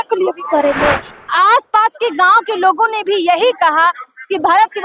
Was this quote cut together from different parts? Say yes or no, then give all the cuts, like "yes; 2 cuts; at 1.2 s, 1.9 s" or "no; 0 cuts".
yes; 1 cut; at 1.1 s